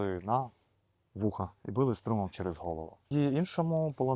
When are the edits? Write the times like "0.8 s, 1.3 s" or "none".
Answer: 3.1 s